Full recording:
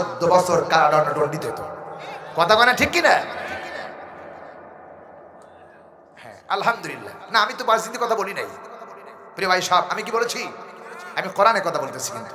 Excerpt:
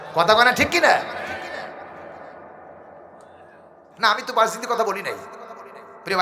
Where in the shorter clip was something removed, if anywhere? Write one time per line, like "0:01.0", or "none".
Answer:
0:03.8